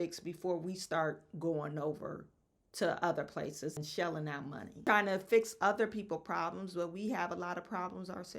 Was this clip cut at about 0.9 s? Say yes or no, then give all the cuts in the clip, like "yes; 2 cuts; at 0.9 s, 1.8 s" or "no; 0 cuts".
no; 2 cuts; at 3.8 s, 4.9 s